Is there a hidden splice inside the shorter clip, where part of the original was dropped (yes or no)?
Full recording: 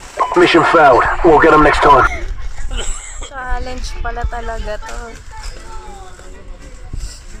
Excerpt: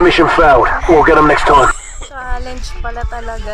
yes